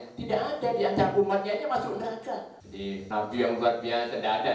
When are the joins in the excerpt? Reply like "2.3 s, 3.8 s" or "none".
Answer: 3.0 s

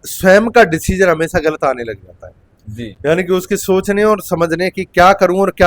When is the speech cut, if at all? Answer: none

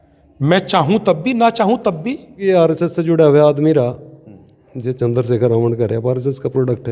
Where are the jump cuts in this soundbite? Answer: 2.3 s

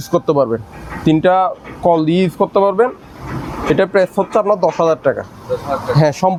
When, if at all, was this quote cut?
none

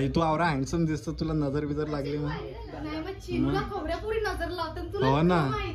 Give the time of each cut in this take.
none

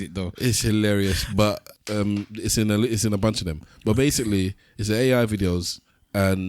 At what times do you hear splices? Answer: 1.8 s

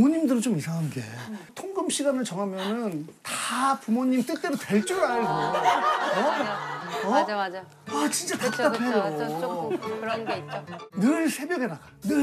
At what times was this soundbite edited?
1.6 s, 10.8 s

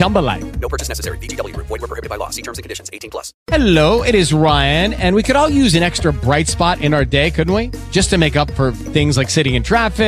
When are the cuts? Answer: 3.4 s

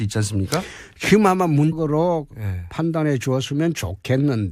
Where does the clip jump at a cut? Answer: none

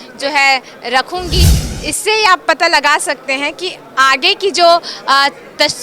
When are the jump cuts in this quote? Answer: 1.6 s

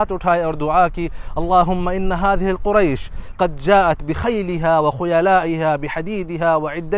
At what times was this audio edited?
none

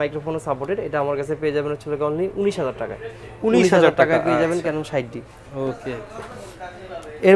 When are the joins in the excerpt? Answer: none

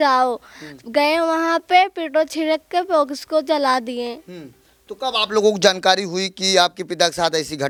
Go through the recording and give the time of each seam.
none

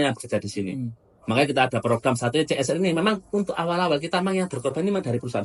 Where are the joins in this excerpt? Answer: none

